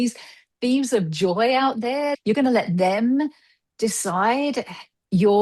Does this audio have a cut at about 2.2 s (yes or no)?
yes